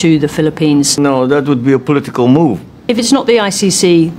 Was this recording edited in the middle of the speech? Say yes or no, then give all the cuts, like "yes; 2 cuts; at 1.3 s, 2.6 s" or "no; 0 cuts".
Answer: yes; 2 cuts; at 1.0 s, 2.7 s